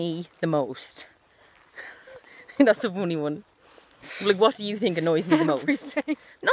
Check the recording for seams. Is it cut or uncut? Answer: uncut